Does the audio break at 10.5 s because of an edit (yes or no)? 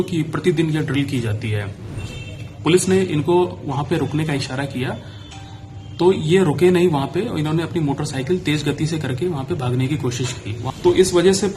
yes